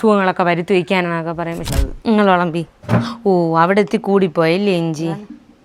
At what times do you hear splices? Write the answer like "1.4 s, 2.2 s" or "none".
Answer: 1.7 s